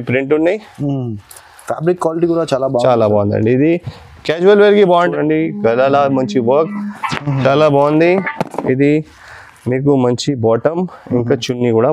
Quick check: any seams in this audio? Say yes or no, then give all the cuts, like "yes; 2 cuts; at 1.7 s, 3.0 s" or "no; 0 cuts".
yes; 1 cut; at 5.1 s